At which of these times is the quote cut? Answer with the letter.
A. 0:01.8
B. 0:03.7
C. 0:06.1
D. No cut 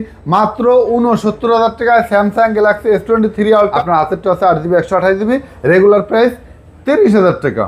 B